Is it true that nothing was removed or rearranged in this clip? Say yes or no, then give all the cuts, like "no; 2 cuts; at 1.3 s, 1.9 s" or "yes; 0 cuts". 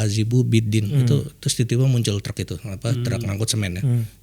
yes; 0 cuts